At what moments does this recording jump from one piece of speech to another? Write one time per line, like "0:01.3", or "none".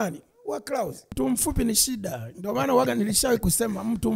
0:01.1

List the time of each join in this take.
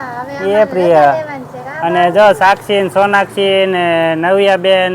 none

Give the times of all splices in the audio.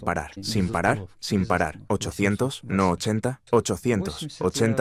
none

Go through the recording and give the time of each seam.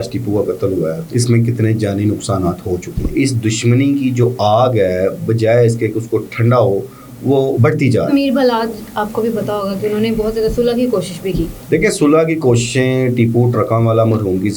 0:01.0
0:03.1
0:08.1
0:11.6

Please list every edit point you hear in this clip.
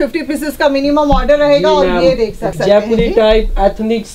0:02.5

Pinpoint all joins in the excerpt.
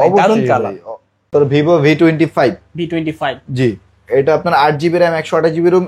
0:01.3

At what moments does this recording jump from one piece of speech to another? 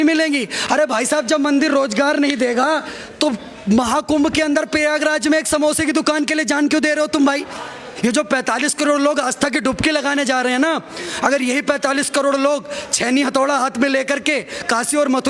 0:07.9

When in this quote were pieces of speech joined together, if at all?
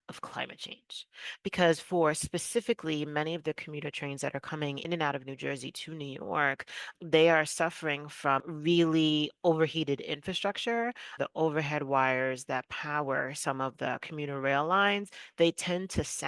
0:04.8
0:06.9
0:08.5
0:11.1

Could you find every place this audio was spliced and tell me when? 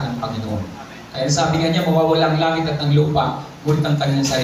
none

